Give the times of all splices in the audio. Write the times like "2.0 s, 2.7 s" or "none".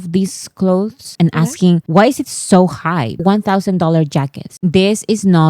3.1 s, 4.5 s

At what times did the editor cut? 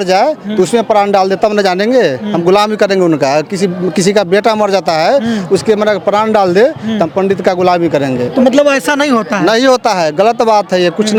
none

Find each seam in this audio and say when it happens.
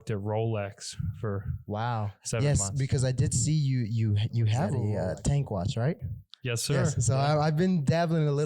4.8 s

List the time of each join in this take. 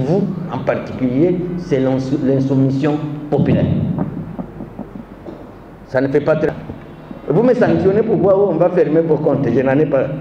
6.5 s

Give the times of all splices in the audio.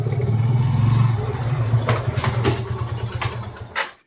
none

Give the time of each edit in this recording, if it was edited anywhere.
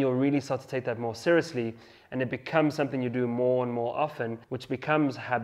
4.5 s

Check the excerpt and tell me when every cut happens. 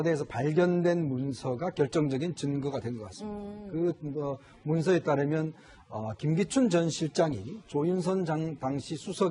none

